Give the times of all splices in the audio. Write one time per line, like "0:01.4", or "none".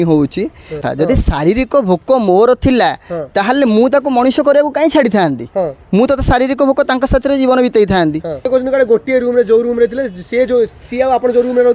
0:00.8
0:08.3